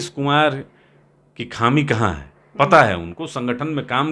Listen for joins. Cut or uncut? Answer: uncut